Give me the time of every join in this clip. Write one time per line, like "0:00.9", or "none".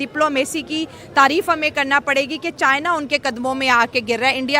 none